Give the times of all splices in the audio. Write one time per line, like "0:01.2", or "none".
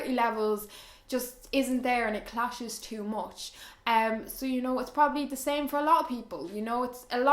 none